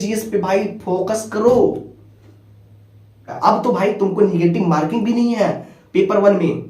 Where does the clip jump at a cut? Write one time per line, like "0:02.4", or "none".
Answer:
0:03.2